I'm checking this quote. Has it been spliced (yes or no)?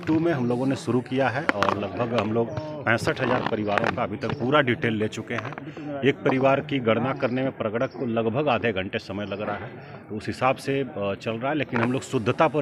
no